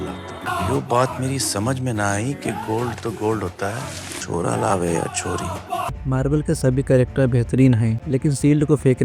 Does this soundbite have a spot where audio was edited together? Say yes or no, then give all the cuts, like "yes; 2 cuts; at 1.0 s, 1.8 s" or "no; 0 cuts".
yes; 2 cuts; at 5.9 s, 8.0 s